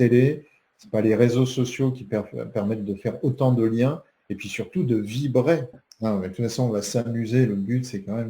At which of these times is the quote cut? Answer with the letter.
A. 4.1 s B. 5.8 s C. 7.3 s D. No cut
B